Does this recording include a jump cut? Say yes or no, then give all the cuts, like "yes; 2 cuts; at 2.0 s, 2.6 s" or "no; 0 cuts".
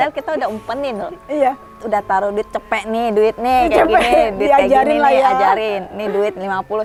no; 0 cuts